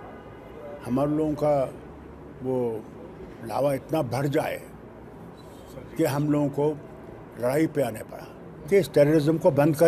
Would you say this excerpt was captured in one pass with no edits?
no; 1 cut; at 8.7 s

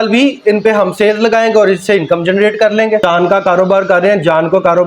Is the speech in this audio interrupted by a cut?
yes; 1 cut; at 3.0 s

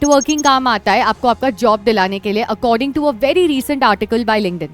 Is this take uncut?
yes; 0 cuts

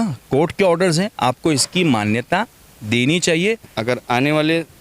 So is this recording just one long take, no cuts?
no; 1 cut; at 3.7 s

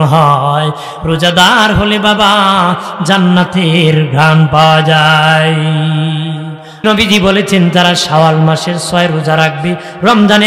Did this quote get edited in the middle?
yes; 1 cut; at 6.6 s

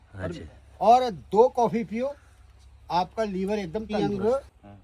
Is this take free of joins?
no; 1 cut; at 3.9 s

